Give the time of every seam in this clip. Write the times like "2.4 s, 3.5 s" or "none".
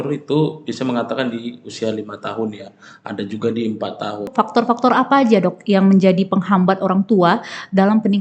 4.3 s